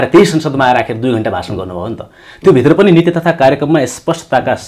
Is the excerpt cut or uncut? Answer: uncut